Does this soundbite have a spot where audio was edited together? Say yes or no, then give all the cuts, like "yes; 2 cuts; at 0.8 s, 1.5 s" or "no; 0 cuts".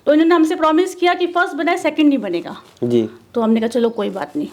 no; 0 cuts